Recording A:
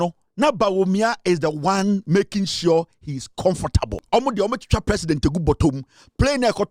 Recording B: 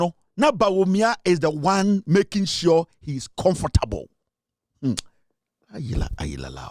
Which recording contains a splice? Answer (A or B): A